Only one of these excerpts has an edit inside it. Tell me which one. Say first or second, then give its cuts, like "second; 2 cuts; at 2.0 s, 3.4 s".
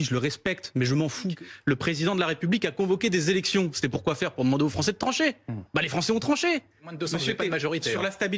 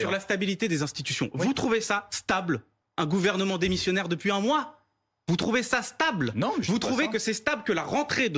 first; 2 cuts; at 1.3 s, 6.9 s